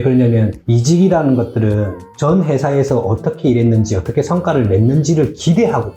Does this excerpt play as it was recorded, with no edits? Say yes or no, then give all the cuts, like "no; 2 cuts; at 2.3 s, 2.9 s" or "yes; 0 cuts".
yes; 0 cuts